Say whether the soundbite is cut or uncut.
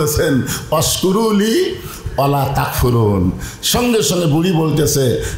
uncut